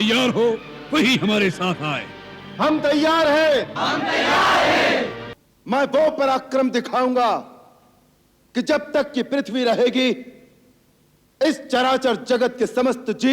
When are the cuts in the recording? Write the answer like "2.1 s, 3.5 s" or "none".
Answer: 5.2 s